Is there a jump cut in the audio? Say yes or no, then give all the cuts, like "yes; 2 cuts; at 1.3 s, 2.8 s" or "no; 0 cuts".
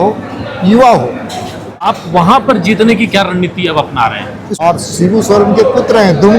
yes; 2 cuts; at 1.9 s, 4.6 s